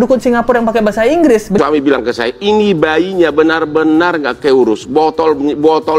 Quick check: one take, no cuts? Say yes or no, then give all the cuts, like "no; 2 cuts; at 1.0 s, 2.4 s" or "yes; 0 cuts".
no; 1 cut; at 1.6 s